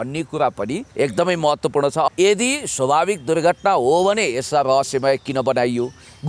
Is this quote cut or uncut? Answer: cut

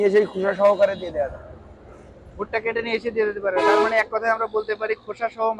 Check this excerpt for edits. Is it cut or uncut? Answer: uncut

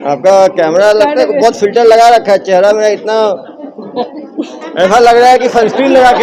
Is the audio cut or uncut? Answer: uncut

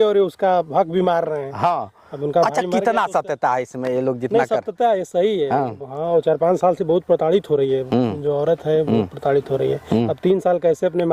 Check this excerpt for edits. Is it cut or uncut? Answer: uncut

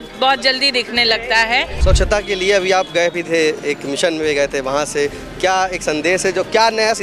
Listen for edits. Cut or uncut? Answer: cut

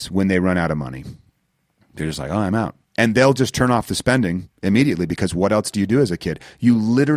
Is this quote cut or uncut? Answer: uncut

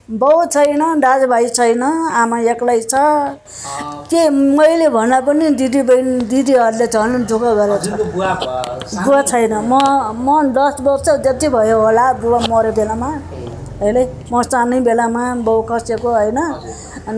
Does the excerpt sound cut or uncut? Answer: uncut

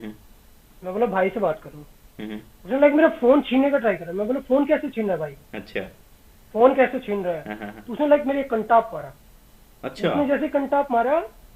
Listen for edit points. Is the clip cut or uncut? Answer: uncut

